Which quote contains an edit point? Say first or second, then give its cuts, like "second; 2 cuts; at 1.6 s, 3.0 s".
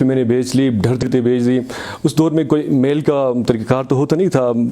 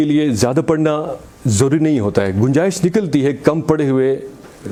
first; 1 cut; at 1.0 s